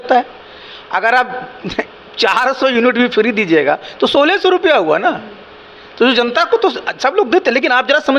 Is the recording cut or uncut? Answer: uncut